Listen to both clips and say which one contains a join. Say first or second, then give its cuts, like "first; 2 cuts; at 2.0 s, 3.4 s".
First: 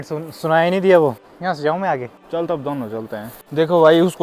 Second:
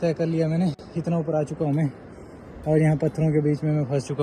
first; 3 cuts; at 1.2 s, 2.2 s, 3.4 s